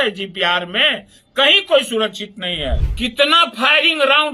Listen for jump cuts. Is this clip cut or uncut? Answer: cut